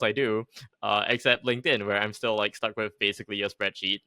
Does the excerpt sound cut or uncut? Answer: uncut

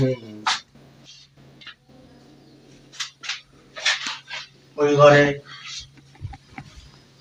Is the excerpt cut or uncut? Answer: uncut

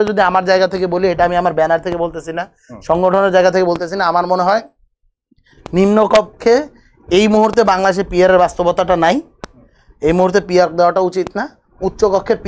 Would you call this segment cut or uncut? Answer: uncut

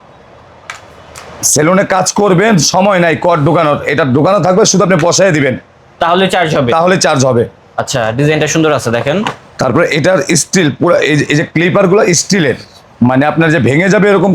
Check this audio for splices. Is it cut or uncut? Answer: uncut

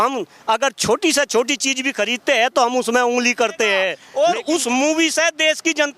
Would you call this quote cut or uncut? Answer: cut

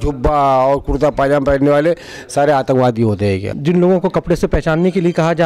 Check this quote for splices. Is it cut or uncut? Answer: cut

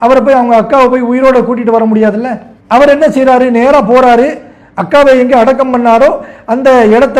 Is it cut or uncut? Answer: uncut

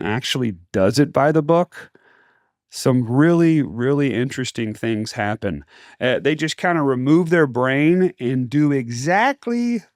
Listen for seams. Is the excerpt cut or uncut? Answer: uncut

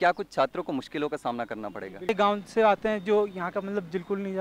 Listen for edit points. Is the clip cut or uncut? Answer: cut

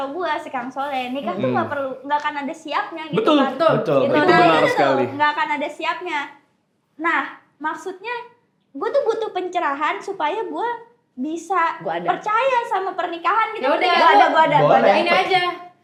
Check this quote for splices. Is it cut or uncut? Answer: uncut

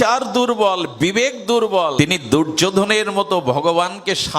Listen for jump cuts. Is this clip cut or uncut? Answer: cut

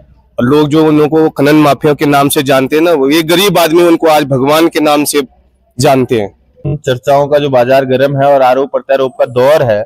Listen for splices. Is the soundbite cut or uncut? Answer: cut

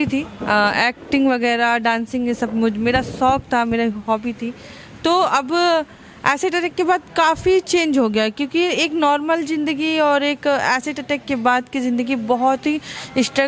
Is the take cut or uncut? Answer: uncut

